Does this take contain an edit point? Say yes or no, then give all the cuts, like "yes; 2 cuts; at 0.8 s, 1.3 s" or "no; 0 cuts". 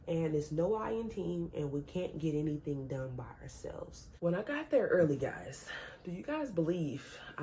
yes; 1 cut; at 4.2 s